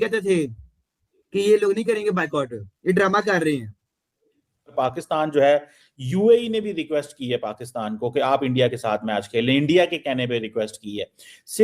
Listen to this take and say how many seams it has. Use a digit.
1